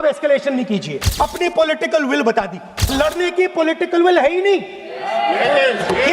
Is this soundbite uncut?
no; 2 cuts; at 1.0 s, 2.9 s

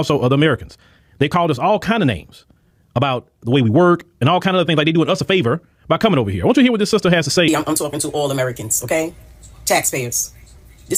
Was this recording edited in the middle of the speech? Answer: no; 0 cuts

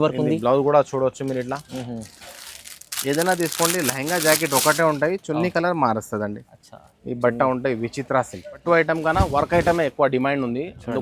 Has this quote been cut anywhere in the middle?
yes; 1 cut; at 8.6 s

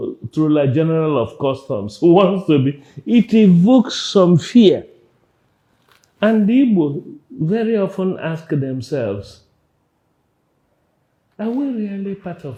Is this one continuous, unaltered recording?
yes; 0 cuts

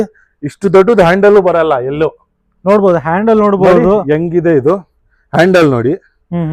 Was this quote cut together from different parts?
no; 0 cuts

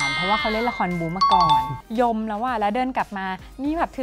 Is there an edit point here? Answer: yes; 1 cut; at 1.8 s

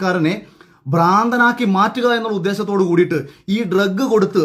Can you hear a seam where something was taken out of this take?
no; 0 cuts

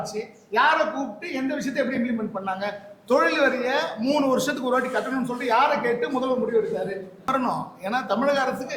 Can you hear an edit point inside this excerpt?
yes; 1 cut; at 7.3 s

